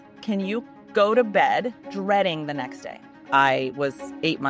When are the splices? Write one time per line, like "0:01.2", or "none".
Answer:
0:01.8
0:03.2